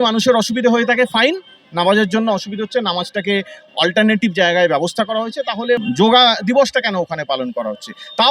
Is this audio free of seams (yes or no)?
no